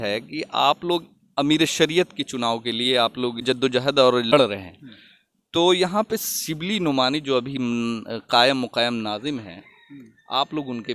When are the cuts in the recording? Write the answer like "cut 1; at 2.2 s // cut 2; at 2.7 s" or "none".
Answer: none